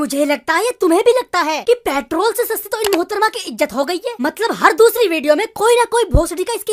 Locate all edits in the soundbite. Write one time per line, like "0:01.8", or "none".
none